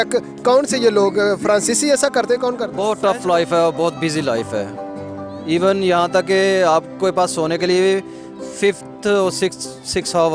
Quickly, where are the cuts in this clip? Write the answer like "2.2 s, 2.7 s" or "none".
2.7 s